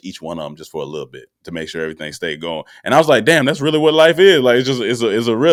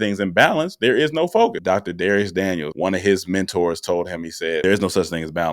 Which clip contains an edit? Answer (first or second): second